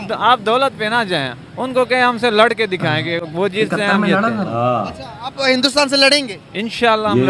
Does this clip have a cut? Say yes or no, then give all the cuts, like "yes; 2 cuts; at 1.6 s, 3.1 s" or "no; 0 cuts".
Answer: no; 0 cuts